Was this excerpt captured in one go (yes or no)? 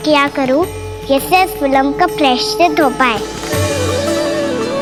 yes